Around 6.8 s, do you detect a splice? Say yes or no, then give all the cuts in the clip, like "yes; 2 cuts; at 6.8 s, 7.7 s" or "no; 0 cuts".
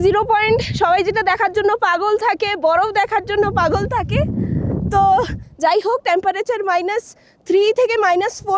no; 1 cut; at 5.4 s